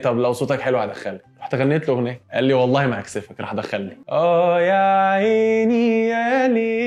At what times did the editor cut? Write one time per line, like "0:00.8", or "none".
0:04.0

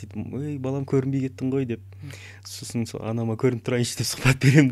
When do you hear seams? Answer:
none

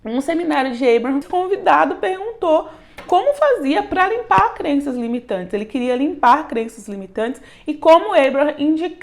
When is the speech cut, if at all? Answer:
0:01.2

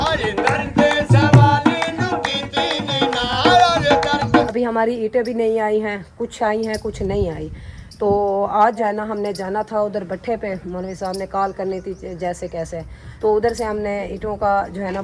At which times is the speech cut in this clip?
0:04.5
0:08.8
0:13.0

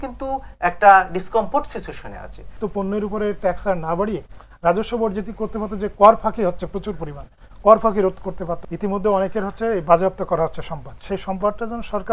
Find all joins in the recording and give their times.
0:02.6
0:08.6

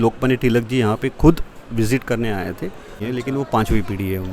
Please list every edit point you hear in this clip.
0:03.0

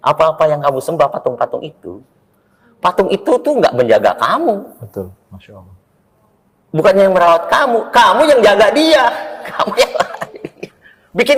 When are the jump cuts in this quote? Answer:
none

